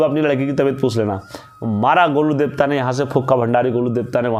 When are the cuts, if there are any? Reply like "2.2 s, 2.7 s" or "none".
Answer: none